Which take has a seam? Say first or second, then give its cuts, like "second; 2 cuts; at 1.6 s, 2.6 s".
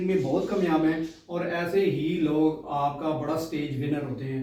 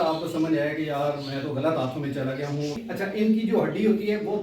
second; 1 cut; at 3.1 s